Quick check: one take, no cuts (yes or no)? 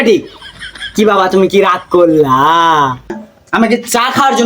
no